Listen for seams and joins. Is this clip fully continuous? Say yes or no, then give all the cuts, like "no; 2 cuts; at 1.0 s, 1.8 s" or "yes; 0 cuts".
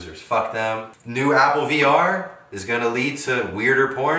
no; 1 cut; at 0.9 s